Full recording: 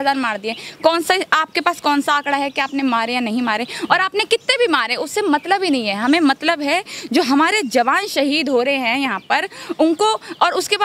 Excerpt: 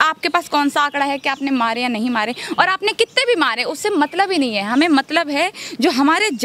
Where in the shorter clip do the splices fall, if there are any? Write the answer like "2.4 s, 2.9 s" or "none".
none